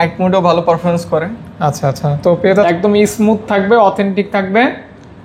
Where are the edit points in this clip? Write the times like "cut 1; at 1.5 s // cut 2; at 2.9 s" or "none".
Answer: cut 1; at 2.6 s